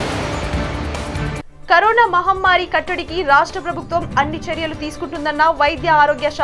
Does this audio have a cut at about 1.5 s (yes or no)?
yes